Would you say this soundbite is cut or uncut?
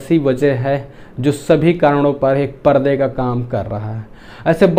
uncut